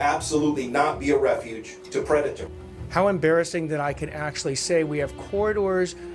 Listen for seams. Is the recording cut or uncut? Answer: cut